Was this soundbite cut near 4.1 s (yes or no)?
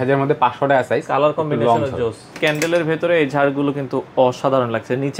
no